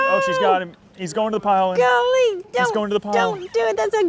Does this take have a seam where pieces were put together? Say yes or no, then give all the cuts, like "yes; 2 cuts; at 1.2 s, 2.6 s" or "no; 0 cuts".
no; 0 cuts